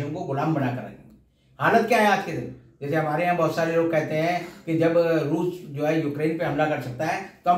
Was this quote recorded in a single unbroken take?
yes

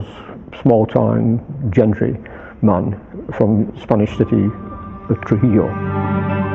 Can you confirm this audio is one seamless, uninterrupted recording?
no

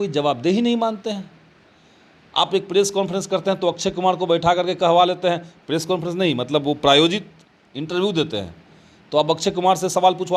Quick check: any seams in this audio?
no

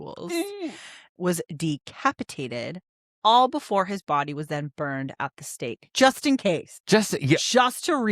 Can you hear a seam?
yes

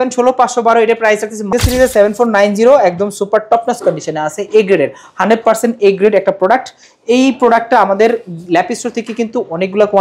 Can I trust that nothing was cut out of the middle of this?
no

